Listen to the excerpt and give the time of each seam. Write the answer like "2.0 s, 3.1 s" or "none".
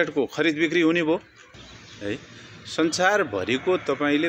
1.4 s